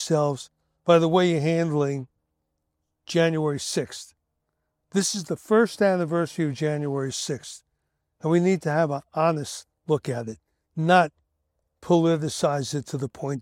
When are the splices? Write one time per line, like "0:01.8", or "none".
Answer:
none